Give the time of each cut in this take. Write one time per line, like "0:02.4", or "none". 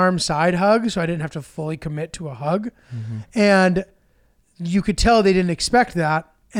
none